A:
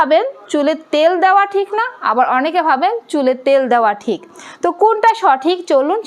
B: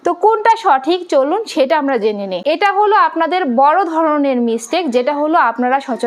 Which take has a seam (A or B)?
B